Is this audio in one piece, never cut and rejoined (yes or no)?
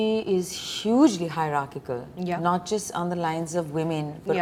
yes